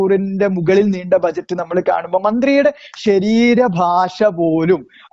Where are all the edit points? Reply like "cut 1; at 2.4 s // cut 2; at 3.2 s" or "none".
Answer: none